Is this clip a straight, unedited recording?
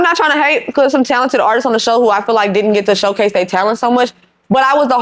yes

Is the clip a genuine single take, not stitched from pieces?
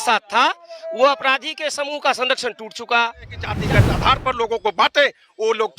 no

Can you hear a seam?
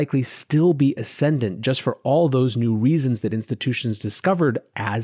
no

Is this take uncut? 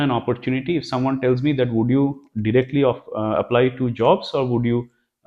yes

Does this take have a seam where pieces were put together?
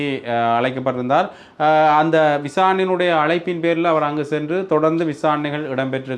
no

